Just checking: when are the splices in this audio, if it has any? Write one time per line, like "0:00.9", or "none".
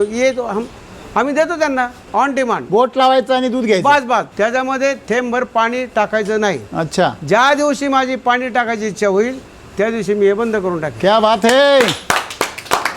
0:02.0
0:04.3
0:10.9